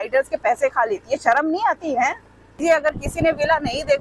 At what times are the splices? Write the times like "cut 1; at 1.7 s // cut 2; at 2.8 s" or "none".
cut 1; at 2.6 s